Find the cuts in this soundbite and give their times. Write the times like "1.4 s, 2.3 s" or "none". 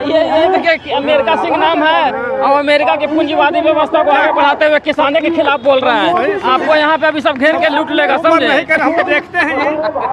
none